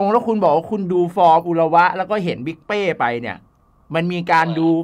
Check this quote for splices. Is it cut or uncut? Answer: uncut